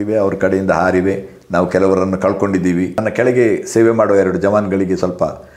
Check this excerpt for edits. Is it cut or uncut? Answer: cut